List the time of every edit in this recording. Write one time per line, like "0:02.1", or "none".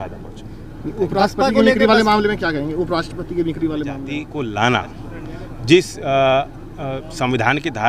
0:04.3